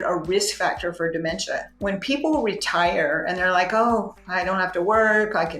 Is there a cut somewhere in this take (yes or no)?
yes